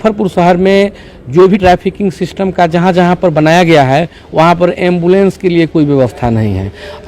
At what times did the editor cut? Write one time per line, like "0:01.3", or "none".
0:01.6